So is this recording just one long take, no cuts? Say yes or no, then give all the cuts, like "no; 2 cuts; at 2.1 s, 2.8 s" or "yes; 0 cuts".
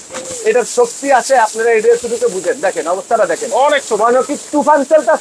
yes; 0 cuts